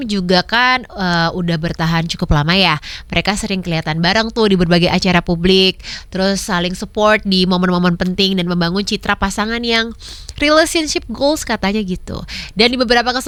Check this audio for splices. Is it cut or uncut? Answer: uncut